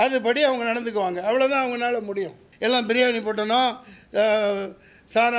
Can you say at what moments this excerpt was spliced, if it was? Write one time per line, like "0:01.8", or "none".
0:02.4